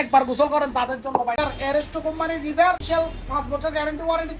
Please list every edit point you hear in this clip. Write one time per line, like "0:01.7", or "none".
0:01.4
0:02.8